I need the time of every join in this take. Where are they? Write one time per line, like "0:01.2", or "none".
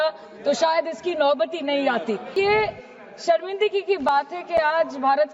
0:02.3